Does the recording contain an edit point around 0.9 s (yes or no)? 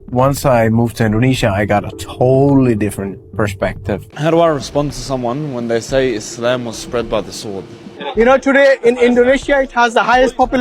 no